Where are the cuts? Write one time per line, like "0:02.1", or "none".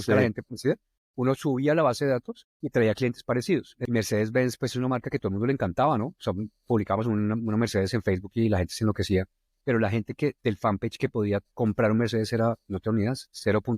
0:03.7